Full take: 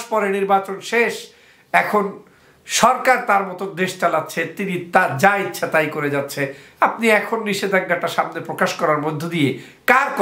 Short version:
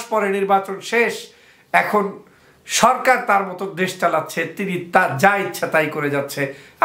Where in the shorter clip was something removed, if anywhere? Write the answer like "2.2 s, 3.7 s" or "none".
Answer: none